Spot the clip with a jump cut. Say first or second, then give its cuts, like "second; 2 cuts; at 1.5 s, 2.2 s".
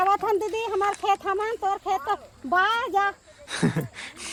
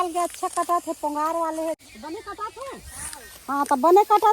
second; 1 cut; at 1.8 s